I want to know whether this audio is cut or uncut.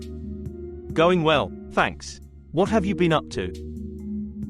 cut